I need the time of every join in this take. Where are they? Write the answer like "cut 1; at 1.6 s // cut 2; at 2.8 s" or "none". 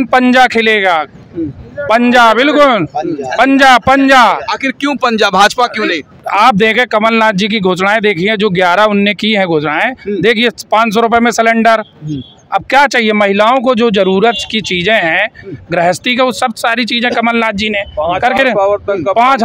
none

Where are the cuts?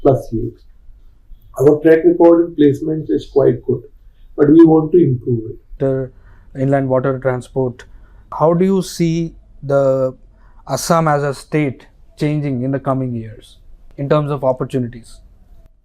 cut 1; at 5.7 s

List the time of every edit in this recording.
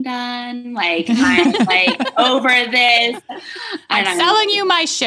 cut 1; at 2.9 s

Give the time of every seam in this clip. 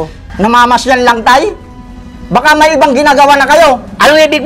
none

